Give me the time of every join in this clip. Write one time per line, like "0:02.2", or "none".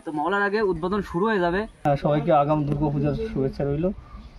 0:01.8